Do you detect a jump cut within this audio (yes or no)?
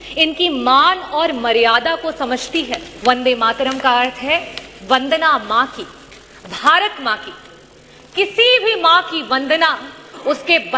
yes